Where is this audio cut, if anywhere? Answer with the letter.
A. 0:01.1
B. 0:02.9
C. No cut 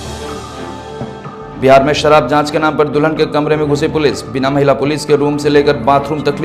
A